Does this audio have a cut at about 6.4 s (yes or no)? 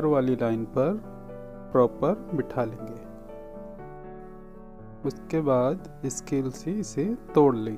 no